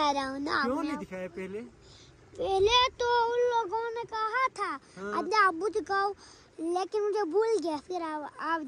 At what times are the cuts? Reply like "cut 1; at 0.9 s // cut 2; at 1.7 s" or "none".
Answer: none